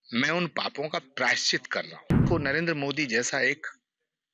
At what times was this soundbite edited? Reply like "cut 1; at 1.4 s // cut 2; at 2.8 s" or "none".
cut 1; at 2.2 s